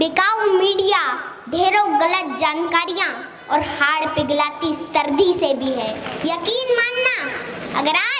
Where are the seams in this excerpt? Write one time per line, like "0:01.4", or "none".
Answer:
0:06.1

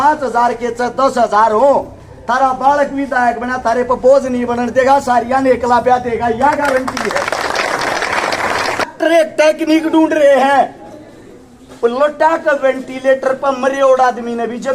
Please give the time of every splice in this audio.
0:08.9

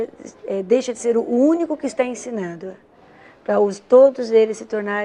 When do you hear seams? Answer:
none

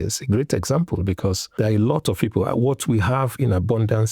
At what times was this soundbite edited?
0:01.4

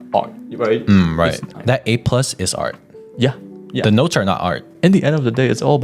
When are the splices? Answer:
0:01.5
0:04.7

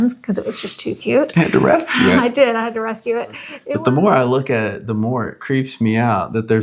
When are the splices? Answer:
0:03.5

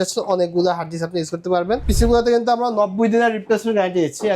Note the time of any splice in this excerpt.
0:01.9

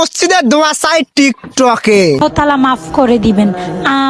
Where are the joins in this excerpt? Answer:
0:02.2

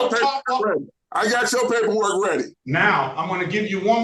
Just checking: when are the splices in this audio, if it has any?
0:01.0
0:02.6

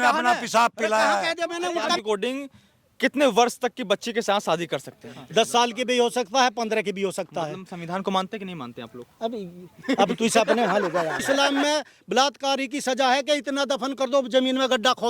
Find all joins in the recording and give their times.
0:02.0
0:05.2
0:11.3

